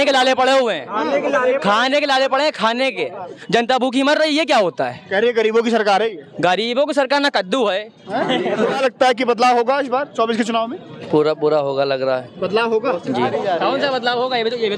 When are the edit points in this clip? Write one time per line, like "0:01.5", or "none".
0:03.4
0:08.8